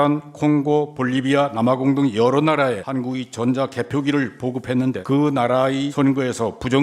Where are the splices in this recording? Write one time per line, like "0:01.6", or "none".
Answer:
0:02.8
0:05.0
0:05.9